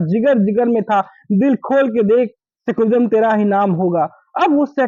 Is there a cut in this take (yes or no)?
no